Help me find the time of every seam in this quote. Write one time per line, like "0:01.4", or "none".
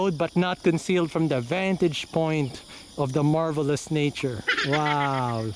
none